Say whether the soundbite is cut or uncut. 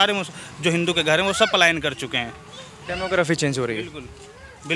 uncut